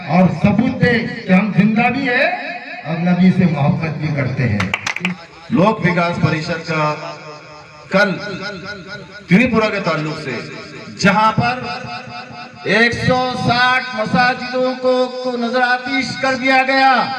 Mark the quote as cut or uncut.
cut